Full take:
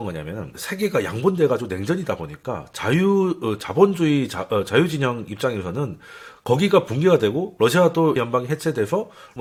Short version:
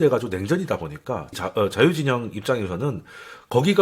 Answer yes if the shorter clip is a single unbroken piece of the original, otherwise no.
no